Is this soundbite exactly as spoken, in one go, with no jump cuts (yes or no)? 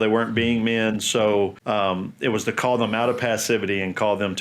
no